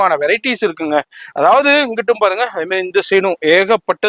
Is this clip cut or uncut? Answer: uncut